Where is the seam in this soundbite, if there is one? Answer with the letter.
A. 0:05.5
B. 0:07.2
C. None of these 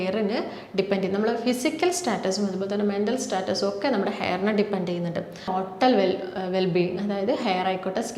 A